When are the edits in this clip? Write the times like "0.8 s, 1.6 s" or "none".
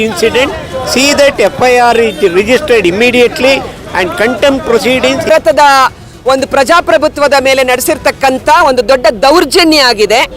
5.3 s